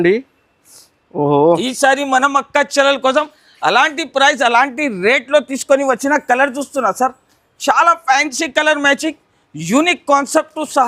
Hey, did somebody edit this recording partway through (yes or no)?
no